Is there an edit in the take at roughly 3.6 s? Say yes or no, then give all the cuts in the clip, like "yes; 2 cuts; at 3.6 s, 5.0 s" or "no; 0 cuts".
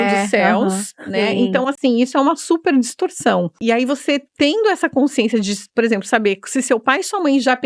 yes; 1 cut; at 3.6 s